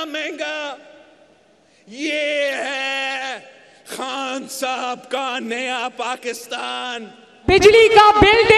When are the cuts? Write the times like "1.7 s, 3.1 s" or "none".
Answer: 7.5 s